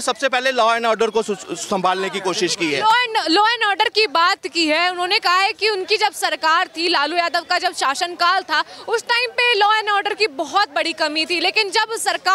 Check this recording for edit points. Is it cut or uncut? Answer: uncut